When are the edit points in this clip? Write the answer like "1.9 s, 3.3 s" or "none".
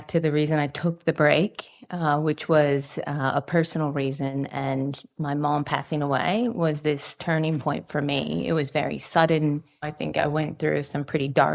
9.9 s